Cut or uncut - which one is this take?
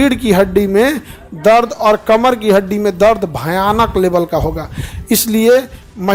uncut